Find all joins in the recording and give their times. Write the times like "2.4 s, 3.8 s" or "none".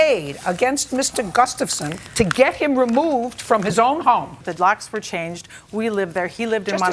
4.4 s